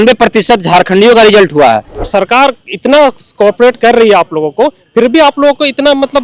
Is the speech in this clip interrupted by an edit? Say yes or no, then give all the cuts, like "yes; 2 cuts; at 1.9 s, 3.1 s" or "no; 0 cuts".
yes; 1 cut; at 2.0 s